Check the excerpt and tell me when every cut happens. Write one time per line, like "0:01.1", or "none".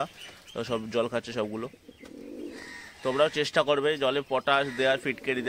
none